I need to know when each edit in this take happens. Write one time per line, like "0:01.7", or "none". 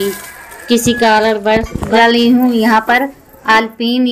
0:01.9